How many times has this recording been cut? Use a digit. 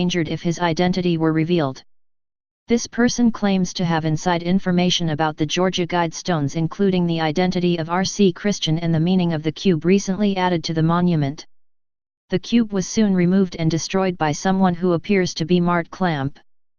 1